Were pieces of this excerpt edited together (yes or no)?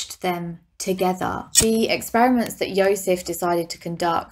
yes